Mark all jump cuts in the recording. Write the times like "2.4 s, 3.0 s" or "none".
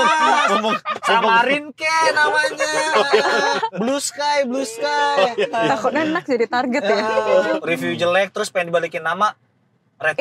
5.5 s, 7.5 s

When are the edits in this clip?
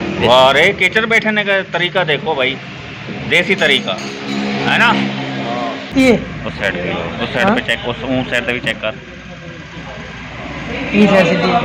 5.4 s

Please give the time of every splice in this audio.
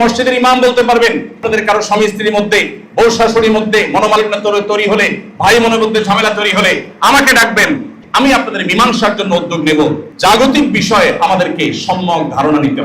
1.4 s, 8.0 s, 10.0 s

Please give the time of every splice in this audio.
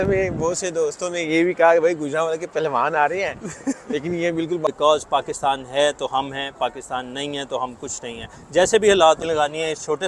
4.7 s, 9.2 s

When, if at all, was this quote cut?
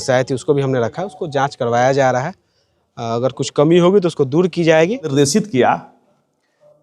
5.1 s

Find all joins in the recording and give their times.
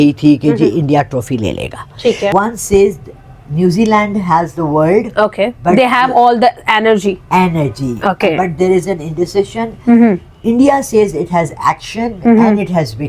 2.3 s

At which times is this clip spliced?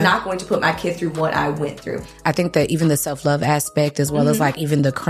2.1 s

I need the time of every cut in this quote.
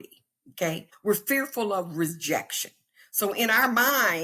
0.9 s

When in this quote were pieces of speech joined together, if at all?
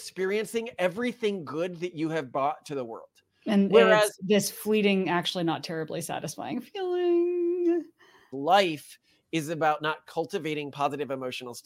8.3 s

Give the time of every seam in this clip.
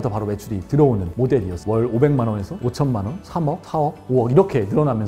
none

